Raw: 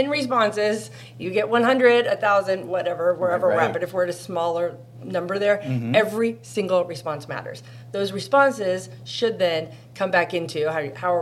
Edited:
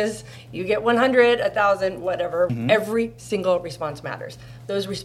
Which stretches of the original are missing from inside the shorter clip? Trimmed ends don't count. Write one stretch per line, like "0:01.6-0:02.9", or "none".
0:03.2-0:05.8

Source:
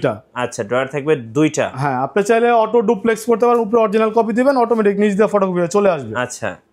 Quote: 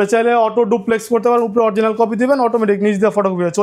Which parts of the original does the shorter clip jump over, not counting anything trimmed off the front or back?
none

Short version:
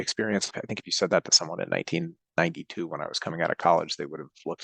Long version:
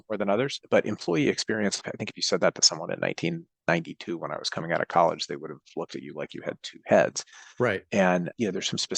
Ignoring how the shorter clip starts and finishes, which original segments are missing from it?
none

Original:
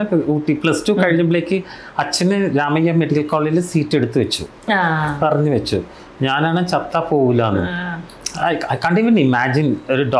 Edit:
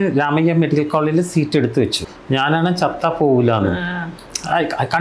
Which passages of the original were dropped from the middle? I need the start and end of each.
0:04.5-0:06.0

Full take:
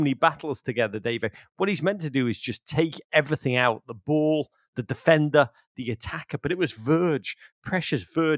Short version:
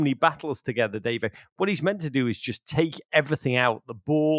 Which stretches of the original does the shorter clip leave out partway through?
none

